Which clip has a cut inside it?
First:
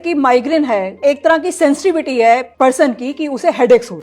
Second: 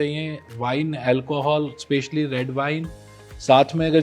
first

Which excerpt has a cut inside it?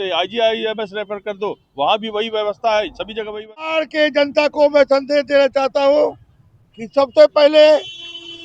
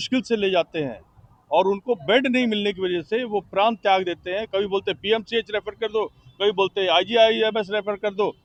first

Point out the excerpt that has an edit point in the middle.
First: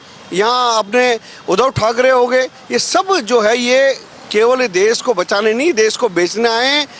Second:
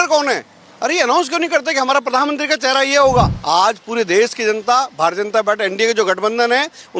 second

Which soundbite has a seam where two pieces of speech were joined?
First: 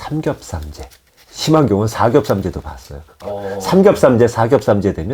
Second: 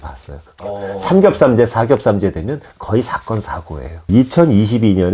second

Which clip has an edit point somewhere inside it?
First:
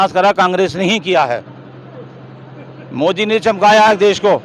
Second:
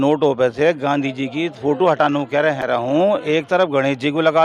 second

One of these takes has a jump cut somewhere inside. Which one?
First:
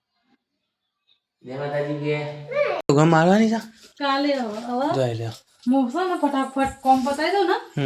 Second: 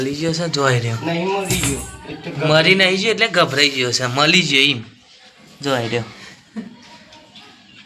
first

